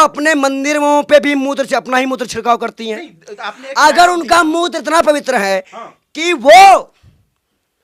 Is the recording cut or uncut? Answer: uncut